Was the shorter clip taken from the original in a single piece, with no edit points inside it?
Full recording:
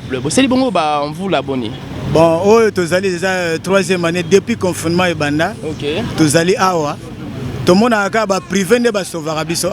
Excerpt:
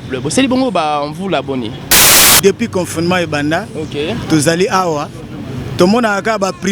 no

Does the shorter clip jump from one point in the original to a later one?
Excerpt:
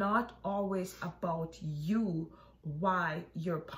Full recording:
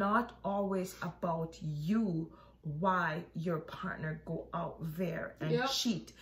no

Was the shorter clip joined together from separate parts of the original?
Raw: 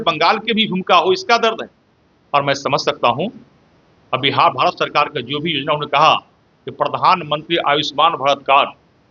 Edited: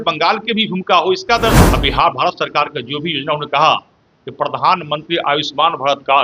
yes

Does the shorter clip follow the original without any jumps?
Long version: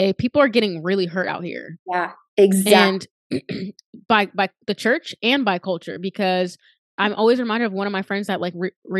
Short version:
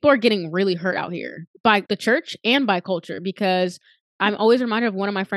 no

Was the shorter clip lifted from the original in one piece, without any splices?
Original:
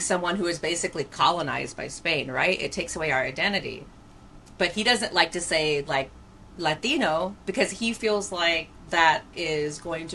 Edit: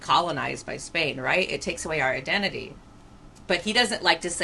yes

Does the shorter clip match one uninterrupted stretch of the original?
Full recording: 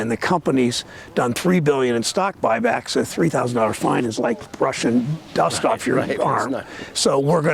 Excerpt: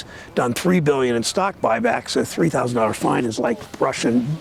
yes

